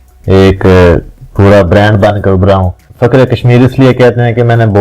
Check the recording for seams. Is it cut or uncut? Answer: cut